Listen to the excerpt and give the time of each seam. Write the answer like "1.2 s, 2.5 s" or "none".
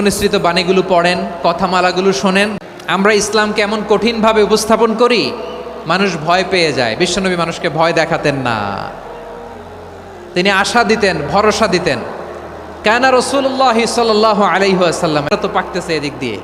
2.5 s, 15.3 s